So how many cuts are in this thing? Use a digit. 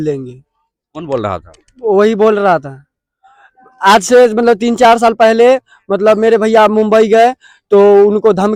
0